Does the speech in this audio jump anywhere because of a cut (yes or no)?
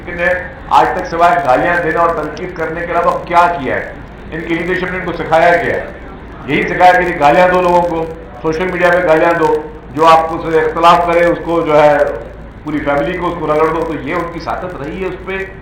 no